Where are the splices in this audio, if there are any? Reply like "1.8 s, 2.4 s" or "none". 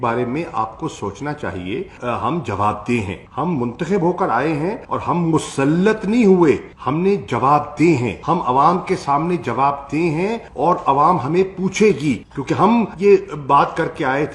none